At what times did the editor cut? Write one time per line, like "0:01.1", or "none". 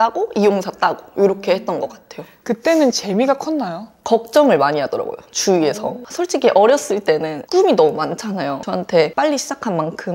none